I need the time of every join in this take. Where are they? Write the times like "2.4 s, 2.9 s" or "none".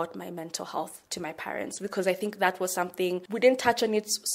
1.0 s, 3.3 s

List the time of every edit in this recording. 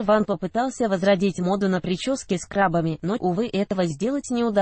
none

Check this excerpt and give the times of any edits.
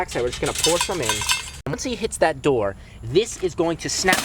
1.7 s

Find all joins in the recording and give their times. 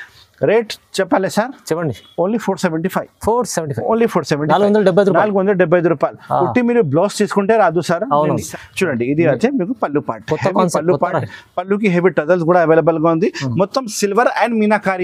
8.5 s

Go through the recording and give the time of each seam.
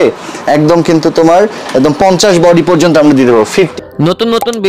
3.7 s

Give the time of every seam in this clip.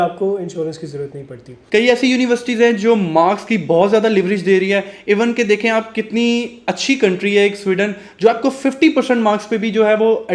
1.6 s

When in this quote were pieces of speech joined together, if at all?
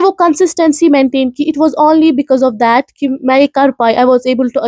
none

